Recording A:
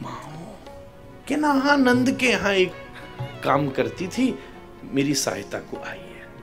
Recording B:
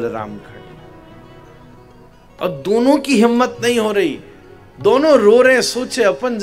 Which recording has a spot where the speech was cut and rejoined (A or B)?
A